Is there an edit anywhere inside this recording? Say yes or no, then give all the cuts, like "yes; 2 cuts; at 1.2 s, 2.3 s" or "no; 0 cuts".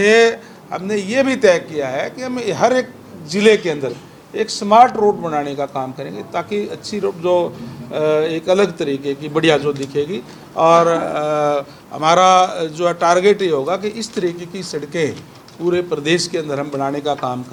no; 0 cuts